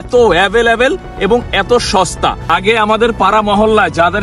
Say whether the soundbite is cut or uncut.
cut